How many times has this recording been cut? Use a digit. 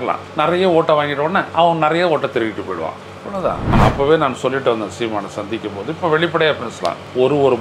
1